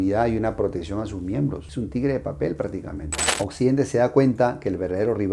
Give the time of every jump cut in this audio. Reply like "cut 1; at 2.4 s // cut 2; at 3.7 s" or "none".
cut 1; at 3.2 s